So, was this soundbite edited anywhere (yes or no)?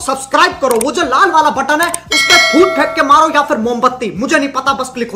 no